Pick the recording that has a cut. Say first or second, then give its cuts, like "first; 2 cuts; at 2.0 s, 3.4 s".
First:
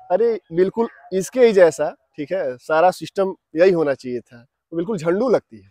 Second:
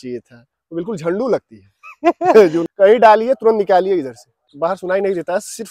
second; 2 cuts; at 2.6 s, 4.4 s